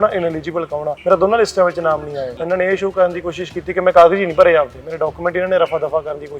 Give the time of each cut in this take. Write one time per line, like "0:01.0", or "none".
0:00.9
0:02.3